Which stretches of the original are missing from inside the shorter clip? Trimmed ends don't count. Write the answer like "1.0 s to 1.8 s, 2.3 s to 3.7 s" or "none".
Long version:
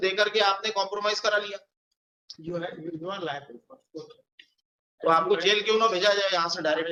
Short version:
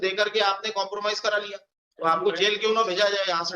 2.0 s to 5.1 s